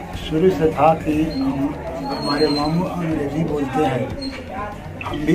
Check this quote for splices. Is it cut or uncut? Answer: uncut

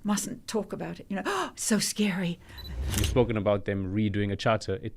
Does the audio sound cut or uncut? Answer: cut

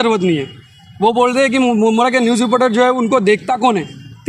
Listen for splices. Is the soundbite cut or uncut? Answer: uncut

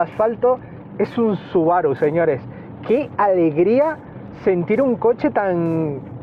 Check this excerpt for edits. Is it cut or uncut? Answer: uncut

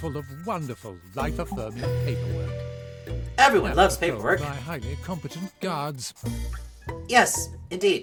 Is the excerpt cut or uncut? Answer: uncut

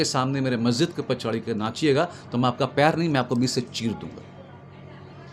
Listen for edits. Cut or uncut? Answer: uncut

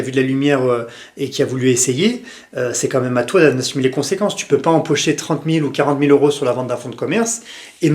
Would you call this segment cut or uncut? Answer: uncut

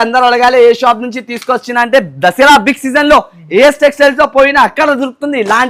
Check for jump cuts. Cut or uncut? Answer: uncut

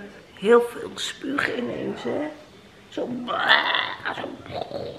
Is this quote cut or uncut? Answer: uncut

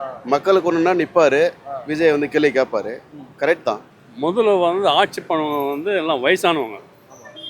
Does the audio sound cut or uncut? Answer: cut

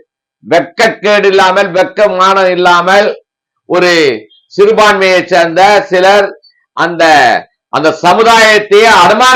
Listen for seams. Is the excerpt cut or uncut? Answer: uncut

